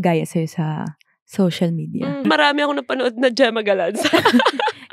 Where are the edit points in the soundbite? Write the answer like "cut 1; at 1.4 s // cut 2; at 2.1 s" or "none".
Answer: cut 1; at 2.2 s